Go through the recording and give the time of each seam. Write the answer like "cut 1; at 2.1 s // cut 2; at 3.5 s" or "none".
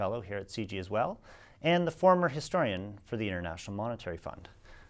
cut 1; at 1.7 s